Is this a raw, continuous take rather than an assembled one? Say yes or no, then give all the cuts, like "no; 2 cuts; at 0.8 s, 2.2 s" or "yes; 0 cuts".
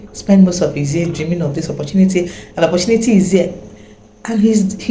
yes; 0 cuts